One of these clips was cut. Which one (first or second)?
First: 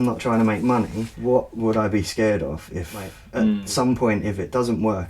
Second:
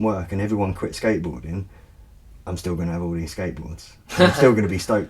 first